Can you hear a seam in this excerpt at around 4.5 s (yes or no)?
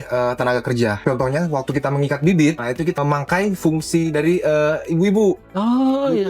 no